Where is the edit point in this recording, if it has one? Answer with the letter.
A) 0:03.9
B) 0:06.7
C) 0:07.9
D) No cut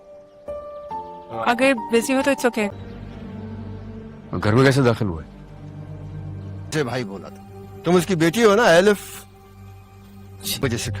B